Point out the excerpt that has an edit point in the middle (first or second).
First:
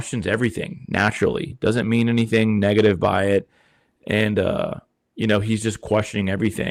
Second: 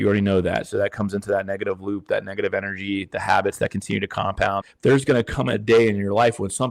second